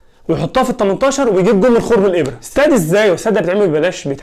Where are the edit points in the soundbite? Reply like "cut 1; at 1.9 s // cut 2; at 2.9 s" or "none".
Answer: cut 1; at 2.4 s